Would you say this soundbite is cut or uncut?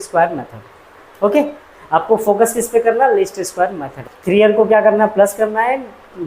cut